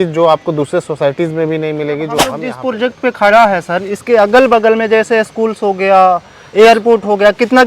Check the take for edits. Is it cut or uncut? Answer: cut